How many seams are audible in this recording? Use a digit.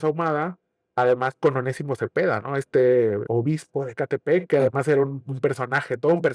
1